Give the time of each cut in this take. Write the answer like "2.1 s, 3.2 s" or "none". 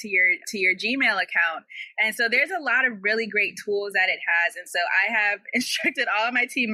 none

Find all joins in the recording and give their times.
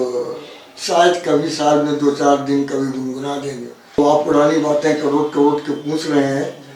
4.0 s

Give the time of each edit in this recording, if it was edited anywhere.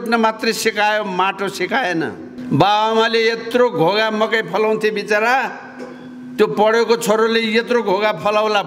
2.3 s

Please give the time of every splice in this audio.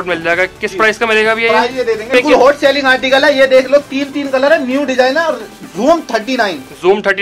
2.1 s

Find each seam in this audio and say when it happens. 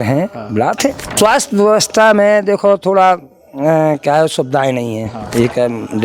1.1 s

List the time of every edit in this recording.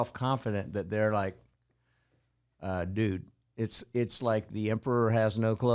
none

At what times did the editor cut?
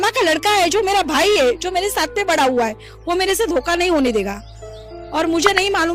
none

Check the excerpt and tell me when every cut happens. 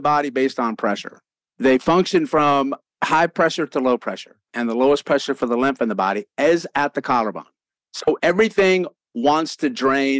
4.4 s

